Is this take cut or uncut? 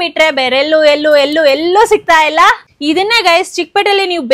cut